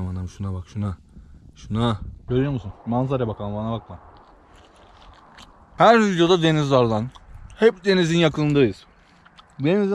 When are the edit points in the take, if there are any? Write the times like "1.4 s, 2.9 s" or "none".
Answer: 2.1 s, 5.8 s